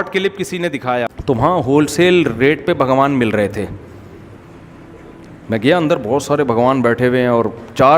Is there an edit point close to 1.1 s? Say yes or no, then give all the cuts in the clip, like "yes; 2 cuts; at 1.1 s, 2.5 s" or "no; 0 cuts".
yes; 1 cut; at 1.1 s